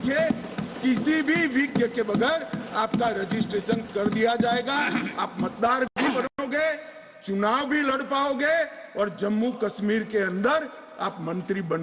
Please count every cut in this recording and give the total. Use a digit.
0